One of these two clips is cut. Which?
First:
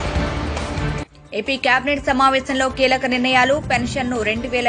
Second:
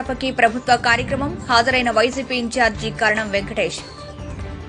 first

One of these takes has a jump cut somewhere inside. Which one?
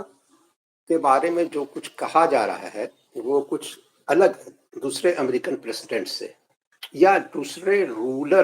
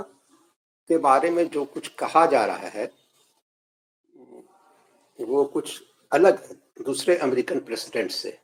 first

